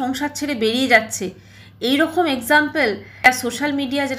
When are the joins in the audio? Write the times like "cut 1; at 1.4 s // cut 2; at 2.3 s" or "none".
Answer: cut 1; at 3.3 s